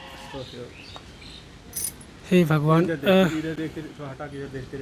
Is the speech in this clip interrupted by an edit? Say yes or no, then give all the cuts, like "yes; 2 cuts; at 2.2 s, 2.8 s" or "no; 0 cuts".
no; 0 cuts